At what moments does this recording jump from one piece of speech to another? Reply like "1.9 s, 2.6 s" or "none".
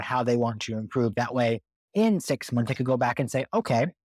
none